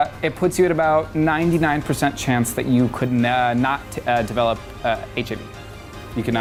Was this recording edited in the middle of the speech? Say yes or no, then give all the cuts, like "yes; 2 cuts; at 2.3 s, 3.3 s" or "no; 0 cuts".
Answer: no; 0 cuts